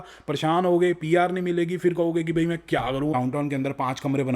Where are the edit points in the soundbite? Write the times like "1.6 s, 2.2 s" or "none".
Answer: 3.1 s